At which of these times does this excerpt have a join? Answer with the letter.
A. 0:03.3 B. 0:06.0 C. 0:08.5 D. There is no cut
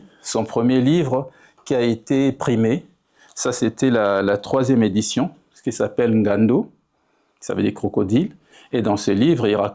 D